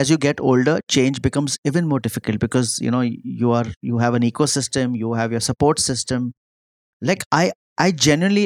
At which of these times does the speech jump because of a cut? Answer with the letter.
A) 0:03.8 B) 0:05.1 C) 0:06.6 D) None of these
D